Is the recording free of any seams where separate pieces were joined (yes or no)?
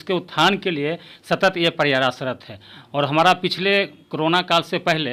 yes